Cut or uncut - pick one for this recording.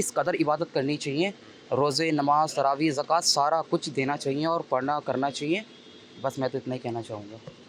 uncut